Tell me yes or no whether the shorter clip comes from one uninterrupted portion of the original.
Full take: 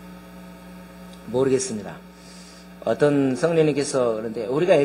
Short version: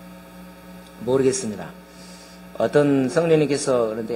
no